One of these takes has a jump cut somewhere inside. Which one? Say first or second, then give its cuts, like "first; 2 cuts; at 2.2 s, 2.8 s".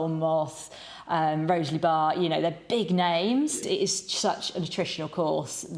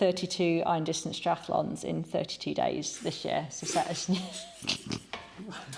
first; 1 cut; at 3.6 s